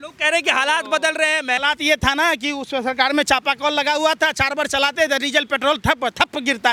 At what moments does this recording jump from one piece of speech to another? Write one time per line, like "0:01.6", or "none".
none

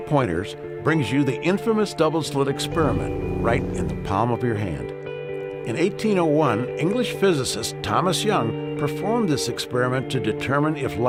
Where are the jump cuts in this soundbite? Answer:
none

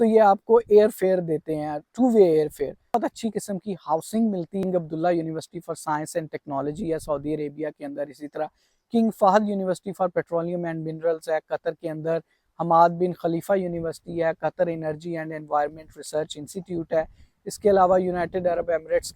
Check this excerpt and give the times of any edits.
0:02.9
0:04.6

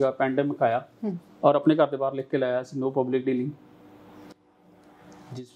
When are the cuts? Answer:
none

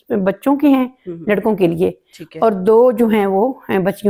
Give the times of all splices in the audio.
none

